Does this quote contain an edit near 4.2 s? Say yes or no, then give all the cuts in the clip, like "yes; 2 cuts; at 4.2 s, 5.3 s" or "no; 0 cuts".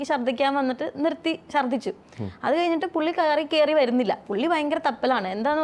no; 0 cuts